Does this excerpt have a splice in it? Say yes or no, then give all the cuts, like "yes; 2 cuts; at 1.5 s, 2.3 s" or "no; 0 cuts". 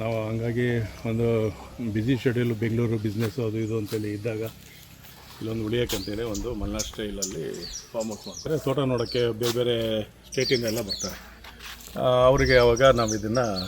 yes; 1 cut; at 8.3 s